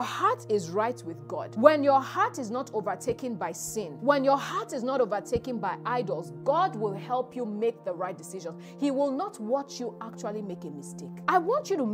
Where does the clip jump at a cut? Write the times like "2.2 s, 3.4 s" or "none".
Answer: 1.4 s, 3.9 s, 11.2 s